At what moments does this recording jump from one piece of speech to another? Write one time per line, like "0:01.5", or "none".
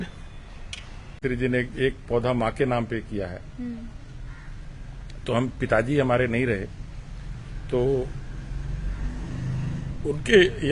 0:01.2